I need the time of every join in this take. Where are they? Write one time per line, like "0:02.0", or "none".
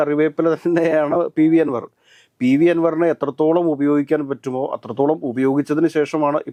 none